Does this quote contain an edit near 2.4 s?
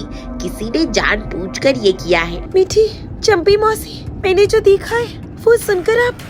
yes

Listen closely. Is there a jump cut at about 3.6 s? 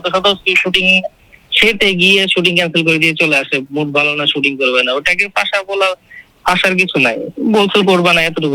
no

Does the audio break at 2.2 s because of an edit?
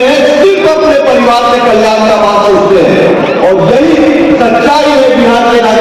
no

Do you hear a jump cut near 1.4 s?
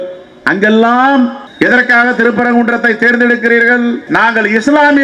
yes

